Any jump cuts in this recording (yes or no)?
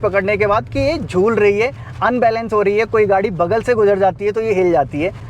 no